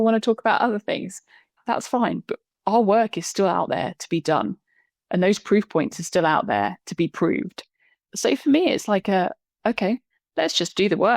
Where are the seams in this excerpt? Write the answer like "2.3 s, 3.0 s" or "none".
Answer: 10.1 s